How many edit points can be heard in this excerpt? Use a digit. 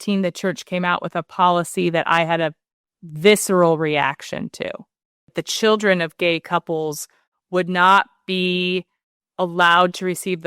1